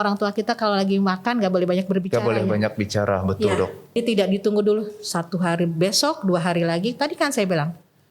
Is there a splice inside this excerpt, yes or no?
yes